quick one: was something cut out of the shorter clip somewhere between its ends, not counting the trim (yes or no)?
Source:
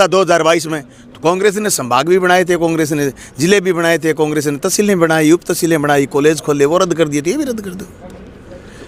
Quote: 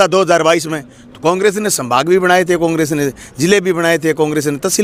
no